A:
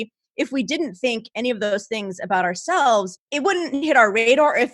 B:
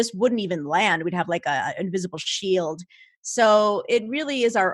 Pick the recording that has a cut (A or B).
A